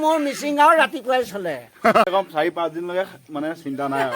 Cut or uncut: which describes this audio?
cut